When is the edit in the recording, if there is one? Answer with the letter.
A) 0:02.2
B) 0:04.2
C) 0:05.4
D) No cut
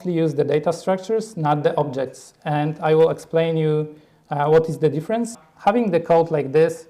C